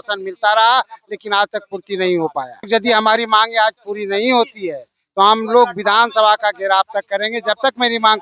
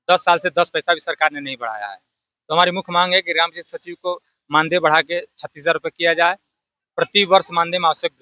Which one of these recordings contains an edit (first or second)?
first